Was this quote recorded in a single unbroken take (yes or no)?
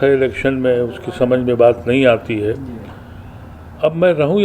yes